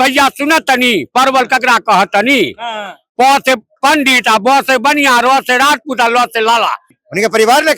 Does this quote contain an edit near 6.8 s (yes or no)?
yes